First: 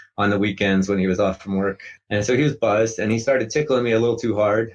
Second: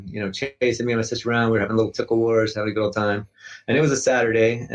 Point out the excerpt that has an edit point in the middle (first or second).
first